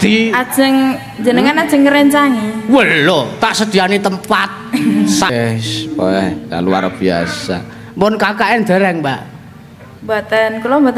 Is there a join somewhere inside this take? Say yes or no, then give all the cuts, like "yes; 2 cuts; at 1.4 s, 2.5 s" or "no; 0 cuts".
yes; 1 cut; at 5.3 s